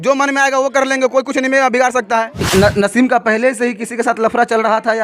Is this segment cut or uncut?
cut